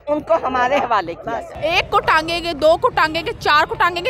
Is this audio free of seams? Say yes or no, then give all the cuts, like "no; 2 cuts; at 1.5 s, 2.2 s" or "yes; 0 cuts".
no; 1 cut; at 1.5 s